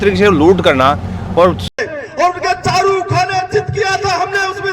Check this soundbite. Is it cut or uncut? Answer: cut